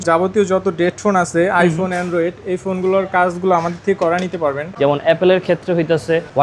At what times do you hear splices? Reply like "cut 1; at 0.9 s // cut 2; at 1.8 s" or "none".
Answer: cut 1; at 4.7 s